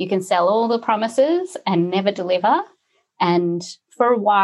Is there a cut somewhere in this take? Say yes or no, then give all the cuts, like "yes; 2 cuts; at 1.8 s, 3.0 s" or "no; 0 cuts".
no; 0 cuts